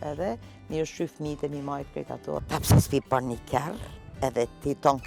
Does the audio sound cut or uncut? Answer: cut